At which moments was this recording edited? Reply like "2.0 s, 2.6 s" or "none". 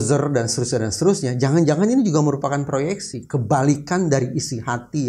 none